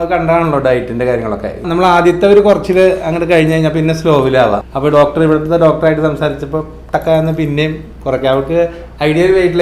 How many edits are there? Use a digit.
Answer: 2